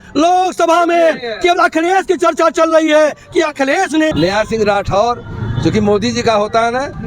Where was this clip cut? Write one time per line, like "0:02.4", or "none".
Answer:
0:04.1